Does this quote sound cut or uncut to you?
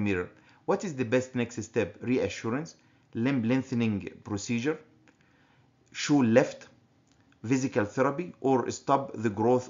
cut